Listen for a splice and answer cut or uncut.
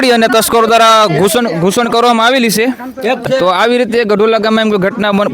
cut